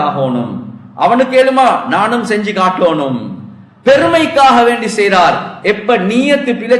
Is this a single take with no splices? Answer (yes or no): yes